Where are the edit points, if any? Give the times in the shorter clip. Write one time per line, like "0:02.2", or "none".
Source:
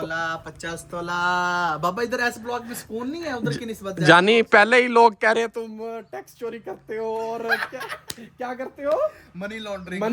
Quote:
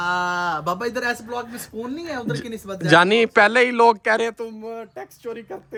none